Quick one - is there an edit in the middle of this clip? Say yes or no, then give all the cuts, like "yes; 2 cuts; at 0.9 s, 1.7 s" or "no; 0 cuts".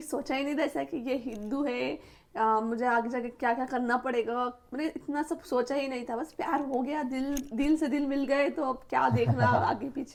no; 0 cuts